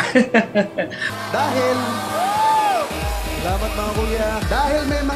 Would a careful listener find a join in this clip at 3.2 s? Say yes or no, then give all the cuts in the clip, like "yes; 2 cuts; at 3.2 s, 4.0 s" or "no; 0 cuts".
no; 1 cut; at 1.0 s